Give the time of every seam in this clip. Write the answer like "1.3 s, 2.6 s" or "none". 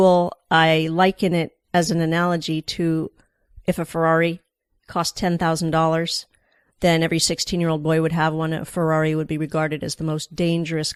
none